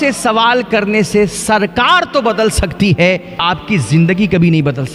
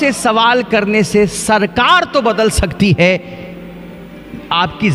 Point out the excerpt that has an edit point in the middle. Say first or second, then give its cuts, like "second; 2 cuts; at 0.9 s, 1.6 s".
first; 1 cut; at 3.3 s